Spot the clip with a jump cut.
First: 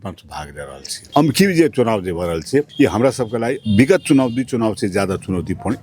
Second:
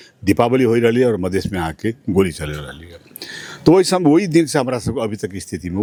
first; 3 cuts; at 0.9 s, 2.7 s, 3.6 s

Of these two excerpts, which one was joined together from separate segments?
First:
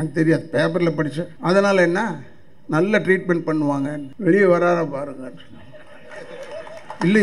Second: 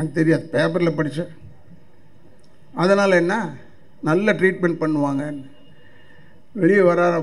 first; 2 cuts; at 1.3 s, 4.1 s

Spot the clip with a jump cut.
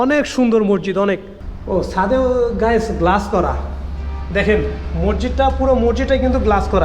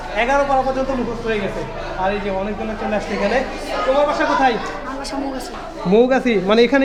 first; 1 cut; at 1.3 s

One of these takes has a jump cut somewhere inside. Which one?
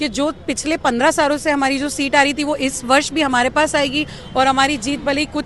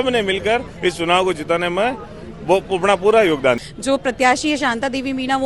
second; 1 cut; at 3.7 s

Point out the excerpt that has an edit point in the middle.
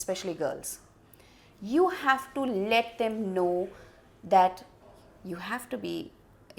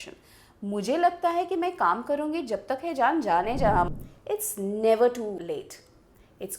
second; 2 cuts; at 3.9 s, 5.4 s

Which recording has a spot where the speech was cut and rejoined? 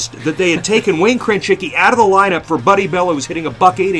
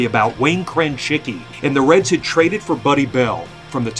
second; 1 cut; at 1.5 s

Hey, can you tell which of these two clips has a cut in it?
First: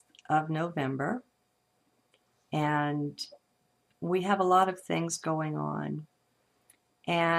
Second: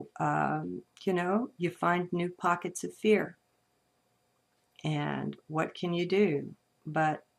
second; 1 cut; at 5.7 s

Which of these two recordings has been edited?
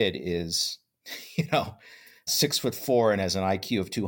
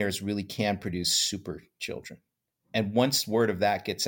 first; 1 cut; at 2.3 s

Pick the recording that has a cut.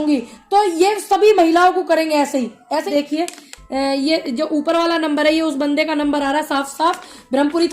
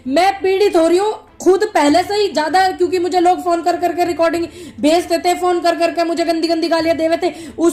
first; 1 cut; at 2.9 s

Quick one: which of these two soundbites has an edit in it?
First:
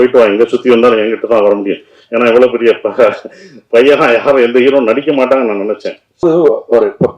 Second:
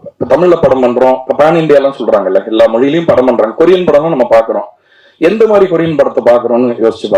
first; 1 cut; at 6.2 s

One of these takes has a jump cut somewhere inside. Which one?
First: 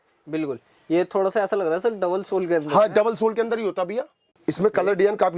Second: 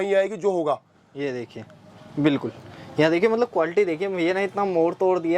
first; 1 cut; at 4.3 s

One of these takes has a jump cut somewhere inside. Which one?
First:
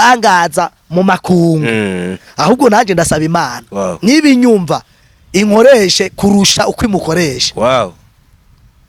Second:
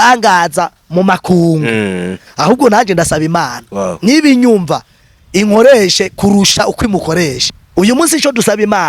second; 1 cut; at 7.4 s

